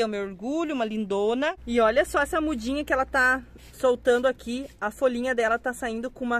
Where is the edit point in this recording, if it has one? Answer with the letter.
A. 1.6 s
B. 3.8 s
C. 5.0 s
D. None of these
A